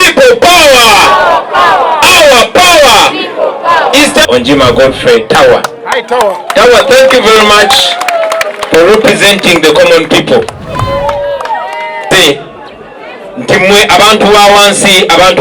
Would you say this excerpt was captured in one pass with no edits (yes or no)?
no